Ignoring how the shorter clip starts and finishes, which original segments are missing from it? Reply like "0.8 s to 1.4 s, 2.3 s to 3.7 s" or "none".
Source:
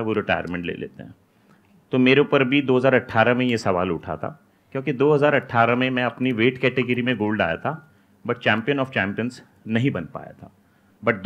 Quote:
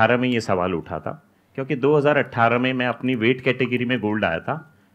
none

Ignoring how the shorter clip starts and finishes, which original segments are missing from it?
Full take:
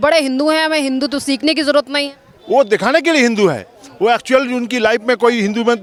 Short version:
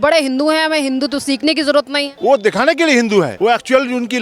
2.0 s to 2.3 s, 3.6 s to 3.9 s

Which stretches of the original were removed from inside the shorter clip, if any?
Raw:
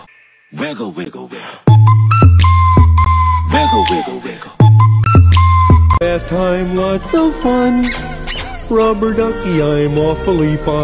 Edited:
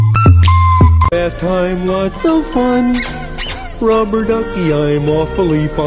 3.0 s to 5.9 s

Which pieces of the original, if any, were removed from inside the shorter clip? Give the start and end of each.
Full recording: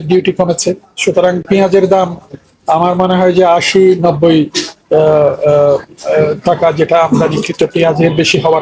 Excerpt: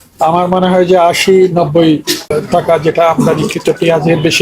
4.8 s to 6.3 s

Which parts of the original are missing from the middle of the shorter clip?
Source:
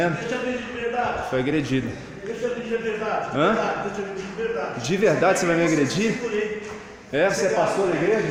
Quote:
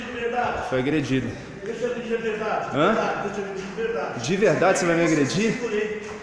none

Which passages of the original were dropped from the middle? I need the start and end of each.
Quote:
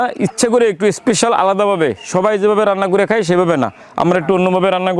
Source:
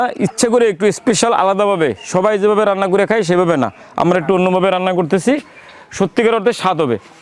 none

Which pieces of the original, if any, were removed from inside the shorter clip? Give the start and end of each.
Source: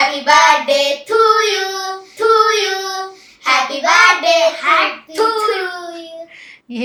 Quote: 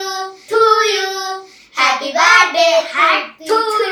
none

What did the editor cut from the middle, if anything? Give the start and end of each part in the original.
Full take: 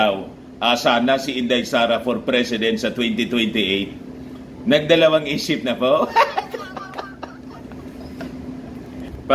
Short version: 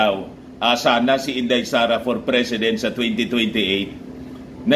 none

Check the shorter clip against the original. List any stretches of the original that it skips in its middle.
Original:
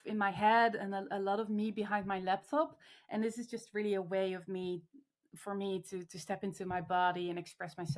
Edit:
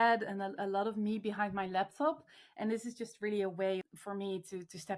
4.4 s to 5.3 s

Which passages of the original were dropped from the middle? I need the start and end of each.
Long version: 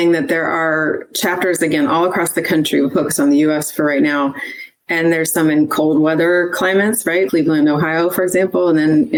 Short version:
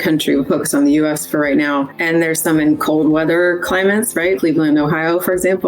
4.4 s to 4.9 s

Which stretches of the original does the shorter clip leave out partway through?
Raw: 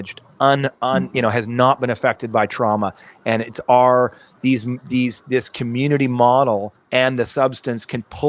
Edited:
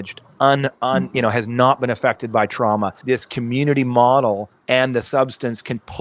3.0 s to 5.2 s

